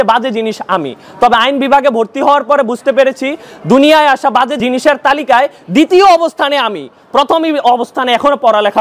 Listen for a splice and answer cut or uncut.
uncut